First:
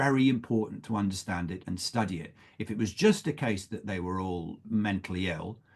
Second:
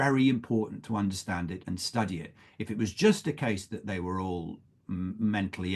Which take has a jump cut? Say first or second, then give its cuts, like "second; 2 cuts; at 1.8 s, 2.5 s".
first; 1 cut; at 4.6 s